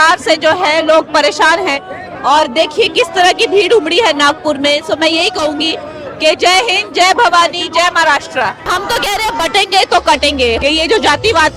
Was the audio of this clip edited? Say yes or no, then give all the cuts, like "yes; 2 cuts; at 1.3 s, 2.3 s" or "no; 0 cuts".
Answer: yes; 2 cuts; at 8.7 s, 10.6 s